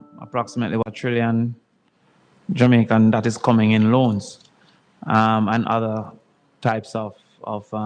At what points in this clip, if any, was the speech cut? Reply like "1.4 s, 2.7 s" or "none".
0.9 s